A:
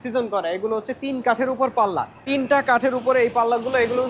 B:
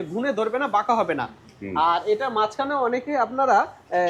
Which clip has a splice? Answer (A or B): A